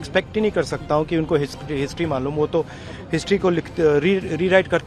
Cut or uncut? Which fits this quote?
uncut